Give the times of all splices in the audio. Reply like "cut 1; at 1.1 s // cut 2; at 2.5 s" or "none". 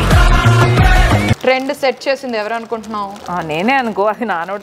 cut 1; at 1.4 s